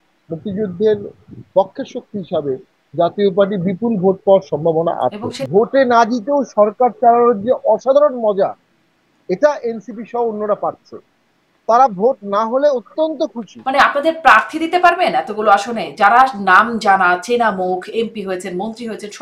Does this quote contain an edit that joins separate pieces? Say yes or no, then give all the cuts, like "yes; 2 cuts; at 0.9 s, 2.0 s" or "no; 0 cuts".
yes; 2 cuts; at 5.3 s, 13.5 s